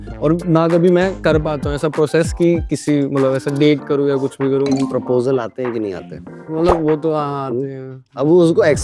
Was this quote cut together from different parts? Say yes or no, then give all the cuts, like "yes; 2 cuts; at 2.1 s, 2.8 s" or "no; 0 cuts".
no; 0 cuts